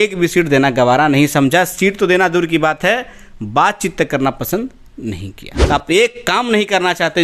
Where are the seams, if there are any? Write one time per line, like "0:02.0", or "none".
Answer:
0:05.5